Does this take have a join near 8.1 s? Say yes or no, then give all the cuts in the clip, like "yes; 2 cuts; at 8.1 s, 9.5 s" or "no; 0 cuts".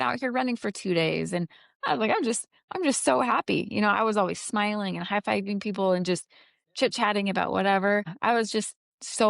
yes; 1 cut; at 8.1 s